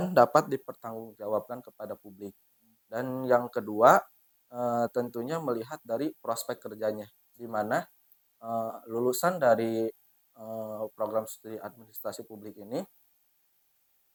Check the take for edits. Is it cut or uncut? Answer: uncut